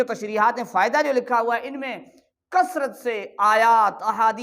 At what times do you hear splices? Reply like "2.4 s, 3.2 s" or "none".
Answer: none

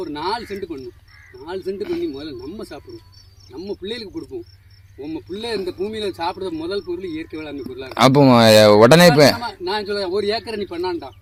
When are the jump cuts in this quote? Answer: none

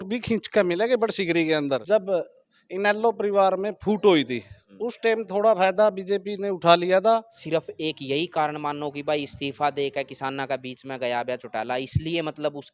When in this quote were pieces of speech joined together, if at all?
1.8 s, 7.4 s

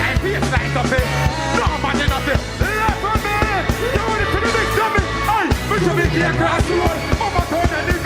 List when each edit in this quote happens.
none

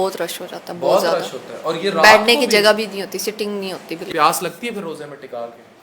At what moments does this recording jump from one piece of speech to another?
4.0 s

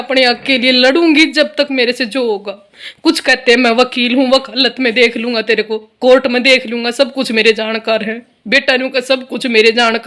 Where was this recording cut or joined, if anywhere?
none

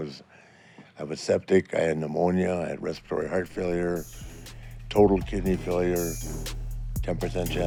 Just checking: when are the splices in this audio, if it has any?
none

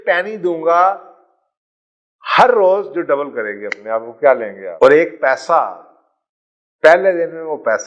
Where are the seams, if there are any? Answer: 4.6 s

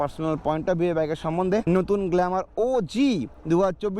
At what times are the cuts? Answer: 1.6 s

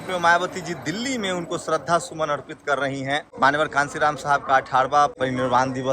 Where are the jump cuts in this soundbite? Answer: 3.3 s, 5.2 s

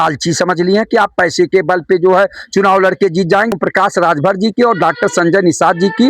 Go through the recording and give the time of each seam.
3.5 s

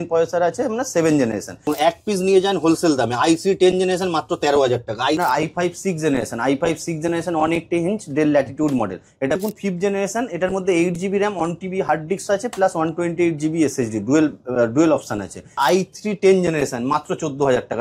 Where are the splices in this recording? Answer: 1.7 s, 5.2 s, 9.4 s, 15.6 s

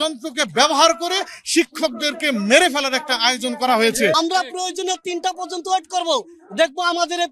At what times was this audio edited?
4.1 s

